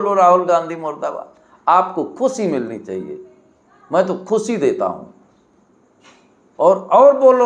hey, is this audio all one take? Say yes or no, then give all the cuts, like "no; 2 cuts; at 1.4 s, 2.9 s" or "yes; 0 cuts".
yes; 0 cuts